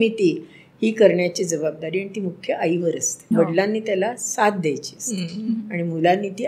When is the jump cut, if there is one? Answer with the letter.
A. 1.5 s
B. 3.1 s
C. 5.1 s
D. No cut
B